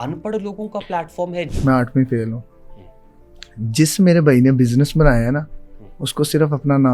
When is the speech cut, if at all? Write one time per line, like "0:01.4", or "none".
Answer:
0:01.5